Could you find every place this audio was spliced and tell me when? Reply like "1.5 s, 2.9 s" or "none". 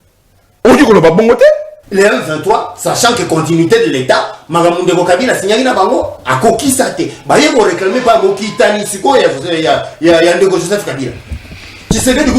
1.8 s